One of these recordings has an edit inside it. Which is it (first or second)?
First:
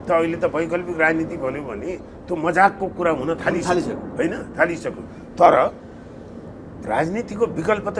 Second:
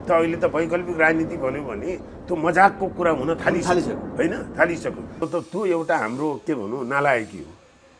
second